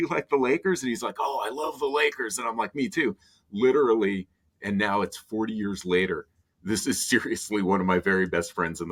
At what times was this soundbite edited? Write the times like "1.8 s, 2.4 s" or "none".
none

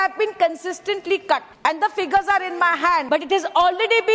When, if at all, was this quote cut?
1.5 s, 3.1 s

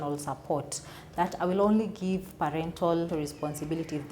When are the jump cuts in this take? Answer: 3.1 s

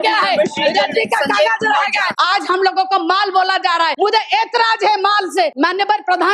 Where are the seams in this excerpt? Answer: 2.1 s, 3.9 s, 5.5 s

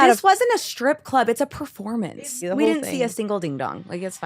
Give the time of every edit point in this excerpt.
2.1 s

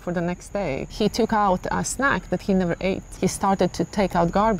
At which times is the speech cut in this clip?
0.9 s, 3.1 s

